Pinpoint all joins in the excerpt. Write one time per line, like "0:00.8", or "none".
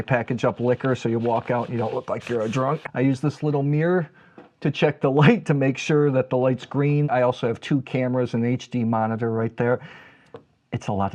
0:02.8
0:07.1
0:09.9